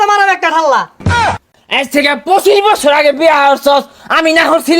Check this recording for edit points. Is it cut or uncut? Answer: cut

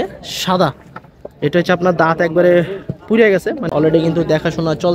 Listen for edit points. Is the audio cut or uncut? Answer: cut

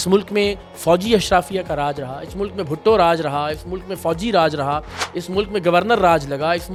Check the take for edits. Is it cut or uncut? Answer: uncut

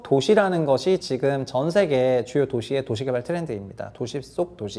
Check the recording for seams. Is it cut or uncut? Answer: uncut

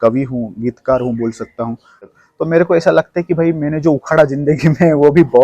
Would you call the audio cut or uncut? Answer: cut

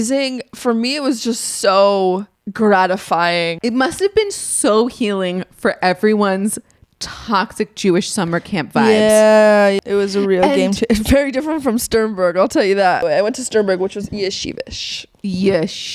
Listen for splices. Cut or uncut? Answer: cut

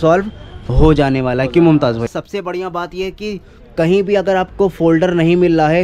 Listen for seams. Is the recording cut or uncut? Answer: cut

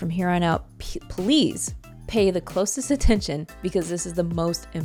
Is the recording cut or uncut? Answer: uncut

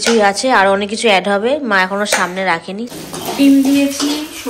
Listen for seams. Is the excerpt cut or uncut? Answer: cut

